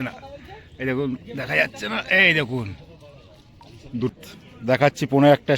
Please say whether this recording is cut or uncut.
cut